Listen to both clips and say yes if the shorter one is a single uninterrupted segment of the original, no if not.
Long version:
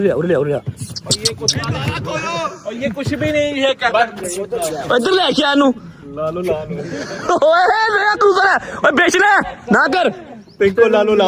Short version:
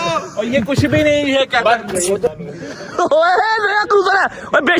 no